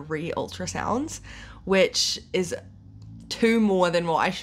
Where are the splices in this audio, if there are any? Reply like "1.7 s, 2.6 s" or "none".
none